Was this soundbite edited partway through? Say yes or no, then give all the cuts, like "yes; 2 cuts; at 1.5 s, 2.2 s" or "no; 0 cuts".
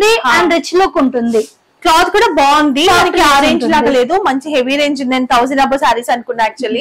no; 0 cuts